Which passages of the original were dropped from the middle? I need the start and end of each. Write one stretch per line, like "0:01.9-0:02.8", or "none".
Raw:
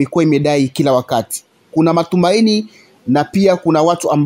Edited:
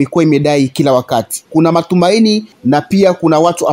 0:01.4-0:01.6
0:02.7-0:02.9